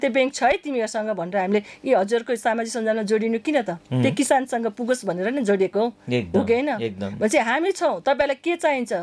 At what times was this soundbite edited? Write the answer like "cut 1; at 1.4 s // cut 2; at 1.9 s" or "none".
none